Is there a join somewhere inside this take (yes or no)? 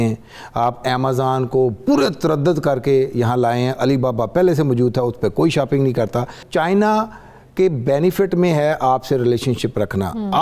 yes